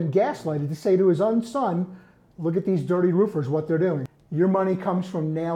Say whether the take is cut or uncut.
cut